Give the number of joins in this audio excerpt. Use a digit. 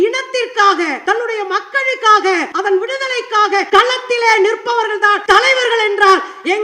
4